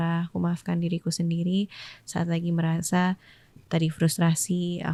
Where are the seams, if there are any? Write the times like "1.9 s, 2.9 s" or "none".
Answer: none